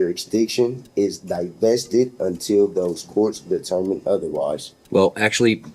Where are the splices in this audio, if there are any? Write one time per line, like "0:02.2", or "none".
0:04.7